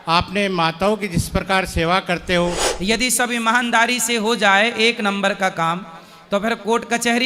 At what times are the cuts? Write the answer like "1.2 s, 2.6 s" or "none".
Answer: 2.7 s